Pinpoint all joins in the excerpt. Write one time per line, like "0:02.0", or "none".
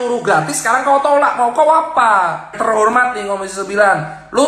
0:02.5